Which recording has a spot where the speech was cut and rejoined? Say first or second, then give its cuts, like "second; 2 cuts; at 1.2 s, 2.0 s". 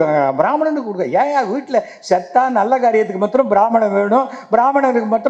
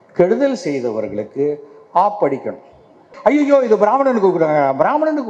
second; 1 cut; at 3.1 s